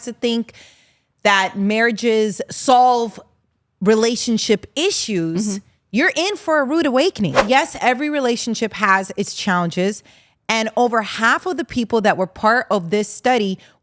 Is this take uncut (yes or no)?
no